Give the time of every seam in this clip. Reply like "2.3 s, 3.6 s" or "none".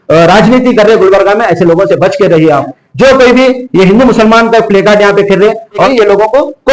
2.8 s, 5.9 s